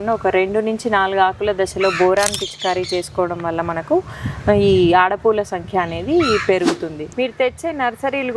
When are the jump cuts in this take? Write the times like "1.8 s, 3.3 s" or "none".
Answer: 7.1 s